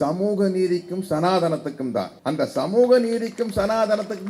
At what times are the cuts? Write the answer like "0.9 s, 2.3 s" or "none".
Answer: 2.1 s